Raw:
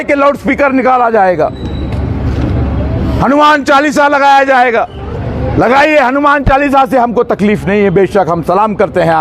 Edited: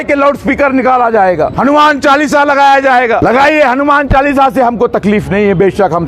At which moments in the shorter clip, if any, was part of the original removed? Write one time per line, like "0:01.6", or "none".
0:01.5
0:03.2